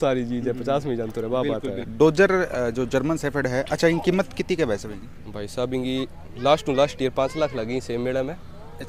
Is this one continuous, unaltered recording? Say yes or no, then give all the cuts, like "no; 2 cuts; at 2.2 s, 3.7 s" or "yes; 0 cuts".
yes; 0 cuts